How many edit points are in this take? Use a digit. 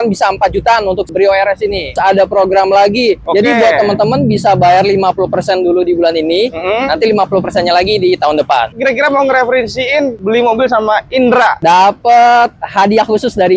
4